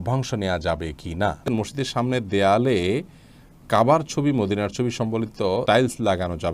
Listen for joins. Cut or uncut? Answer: cut